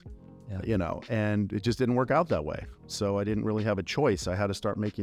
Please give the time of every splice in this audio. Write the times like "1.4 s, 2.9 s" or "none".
none